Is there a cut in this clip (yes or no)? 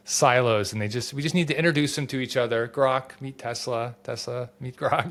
no